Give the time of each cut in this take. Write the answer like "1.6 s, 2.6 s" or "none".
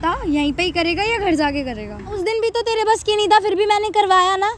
2.2 s